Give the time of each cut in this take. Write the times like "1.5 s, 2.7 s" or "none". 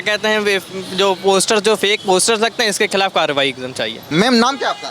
none